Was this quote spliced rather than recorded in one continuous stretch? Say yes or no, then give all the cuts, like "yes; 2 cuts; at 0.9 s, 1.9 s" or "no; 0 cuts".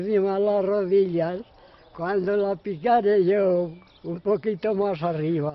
no; 0 cuts